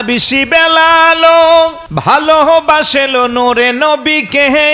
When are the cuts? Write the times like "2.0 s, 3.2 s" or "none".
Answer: 1.9 s